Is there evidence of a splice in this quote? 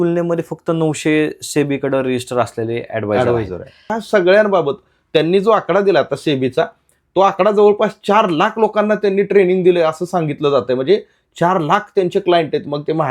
yes; 1 cut; at 4.0 s

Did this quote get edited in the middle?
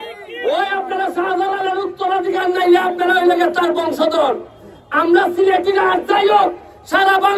no; 0 cuts

